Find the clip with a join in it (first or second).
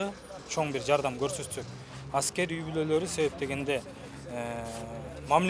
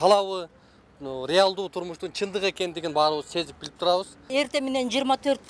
second